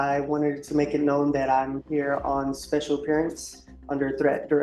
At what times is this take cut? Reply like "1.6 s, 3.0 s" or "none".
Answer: none